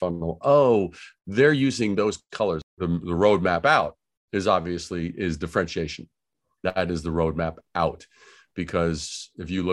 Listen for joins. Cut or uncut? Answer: cut